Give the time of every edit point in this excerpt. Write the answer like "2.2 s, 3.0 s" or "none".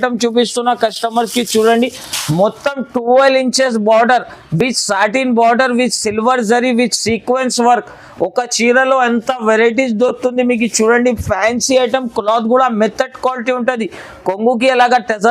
none